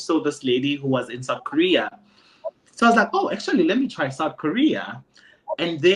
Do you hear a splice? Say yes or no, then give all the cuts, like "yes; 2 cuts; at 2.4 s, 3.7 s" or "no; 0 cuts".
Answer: no; 0 cuts